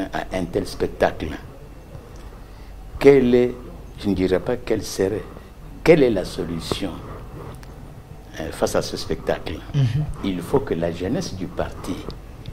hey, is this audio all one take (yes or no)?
yes